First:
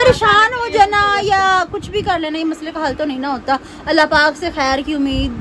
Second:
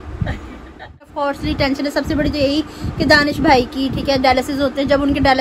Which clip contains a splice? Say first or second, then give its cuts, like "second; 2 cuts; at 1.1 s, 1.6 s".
second; 1 cut; at 1.1 s